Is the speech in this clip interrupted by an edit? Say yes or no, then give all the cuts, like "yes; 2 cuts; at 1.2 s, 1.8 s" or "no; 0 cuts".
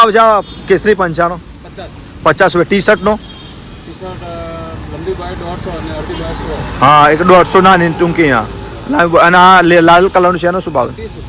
no; 0 cuts